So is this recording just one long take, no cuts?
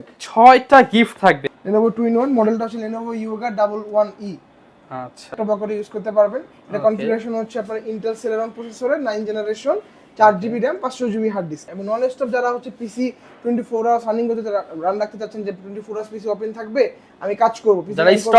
no; 3 cuts; at 1.5 s, 5.4 s, 11.7 s

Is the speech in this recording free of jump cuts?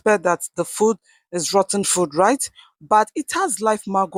yes; 0 cuts

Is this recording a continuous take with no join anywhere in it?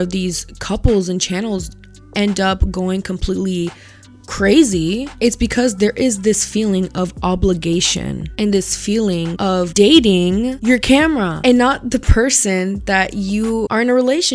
yes; 0 cuts

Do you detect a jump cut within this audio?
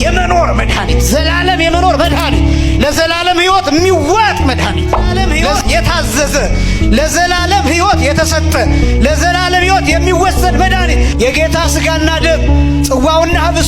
yes; 1 cut; at 5.3 s

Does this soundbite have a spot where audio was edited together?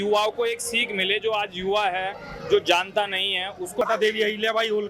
yes; 1 cut; at 3.8 s

